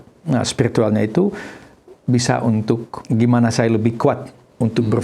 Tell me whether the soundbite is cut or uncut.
cut